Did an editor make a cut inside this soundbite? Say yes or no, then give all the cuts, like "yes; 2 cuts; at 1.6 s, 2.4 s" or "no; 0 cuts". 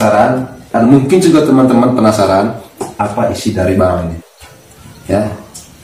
no; 0 cuts